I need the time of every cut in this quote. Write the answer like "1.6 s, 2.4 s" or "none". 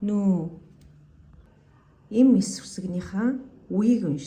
1.4 s